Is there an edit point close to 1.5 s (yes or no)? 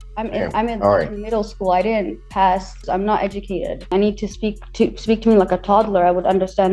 no